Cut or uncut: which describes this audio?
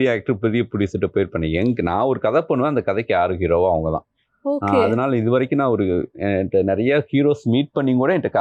uncut